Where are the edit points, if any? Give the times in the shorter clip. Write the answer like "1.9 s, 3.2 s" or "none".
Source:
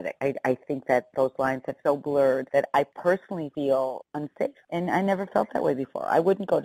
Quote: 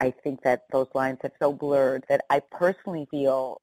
none